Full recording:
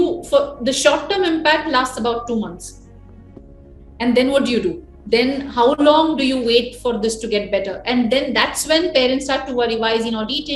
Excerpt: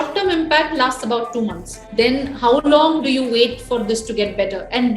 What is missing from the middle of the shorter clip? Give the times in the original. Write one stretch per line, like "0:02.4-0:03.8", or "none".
0:02.7-0:04.9